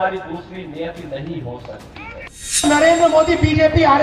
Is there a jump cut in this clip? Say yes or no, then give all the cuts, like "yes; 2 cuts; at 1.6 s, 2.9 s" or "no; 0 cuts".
yes; 1 cut; at 2.6 s